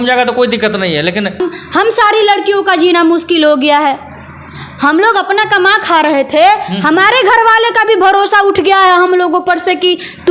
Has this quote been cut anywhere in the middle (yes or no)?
yes